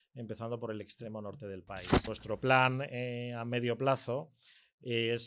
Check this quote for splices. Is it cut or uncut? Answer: cut